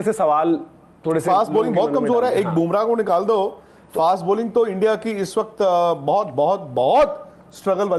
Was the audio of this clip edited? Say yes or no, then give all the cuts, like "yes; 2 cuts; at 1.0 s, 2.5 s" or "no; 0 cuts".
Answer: no; 0 cuts